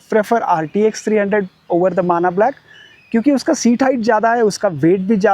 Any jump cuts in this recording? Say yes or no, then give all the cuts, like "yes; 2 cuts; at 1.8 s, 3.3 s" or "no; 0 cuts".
no; 0 cuts